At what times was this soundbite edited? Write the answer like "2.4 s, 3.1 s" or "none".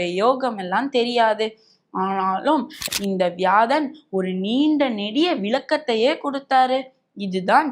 2.9 s